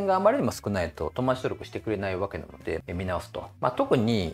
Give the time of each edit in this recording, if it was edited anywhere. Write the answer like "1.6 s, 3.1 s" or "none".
2.8 s